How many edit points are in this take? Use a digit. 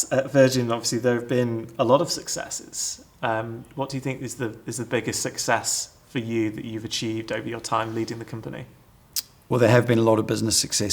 0